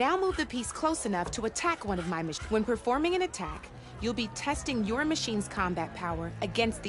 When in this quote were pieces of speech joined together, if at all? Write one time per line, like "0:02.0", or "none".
0:02.4
0:05.3